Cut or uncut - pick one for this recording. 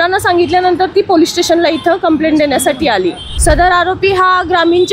cut